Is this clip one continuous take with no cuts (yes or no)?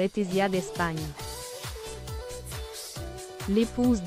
no